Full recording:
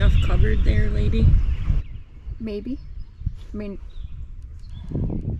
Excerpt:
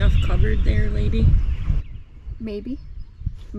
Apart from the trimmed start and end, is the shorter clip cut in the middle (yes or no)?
no